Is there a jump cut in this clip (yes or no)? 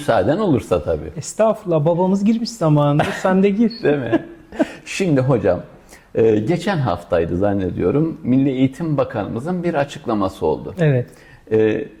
no